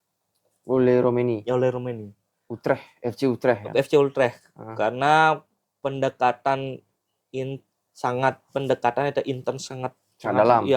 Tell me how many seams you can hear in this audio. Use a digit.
0